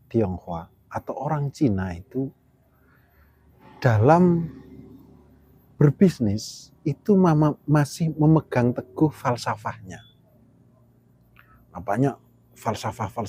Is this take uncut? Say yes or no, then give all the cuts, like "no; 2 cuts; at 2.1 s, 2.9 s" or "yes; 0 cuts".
no; 1 cut; at 3.6 s